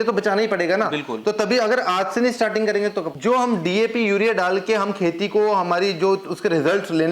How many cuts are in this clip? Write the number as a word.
one